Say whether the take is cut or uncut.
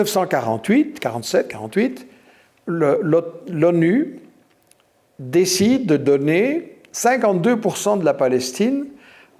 uncut